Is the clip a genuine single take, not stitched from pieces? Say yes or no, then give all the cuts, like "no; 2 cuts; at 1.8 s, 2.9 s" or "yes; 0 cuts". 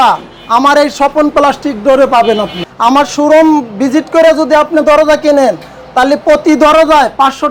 no; 1 cut; at 2.6 s